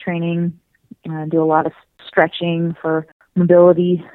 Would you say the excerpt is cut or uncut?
cut